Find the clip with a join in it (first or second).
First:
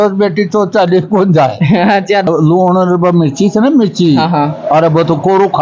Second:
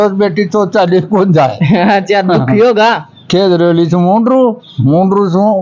first